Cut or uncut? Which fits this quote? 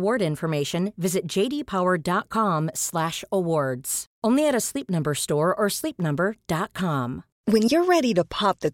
cut